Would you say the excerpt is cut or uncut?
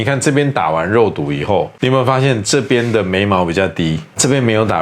uncut